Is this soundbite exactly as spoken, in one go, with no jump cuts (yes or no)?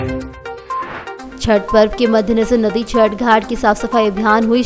yes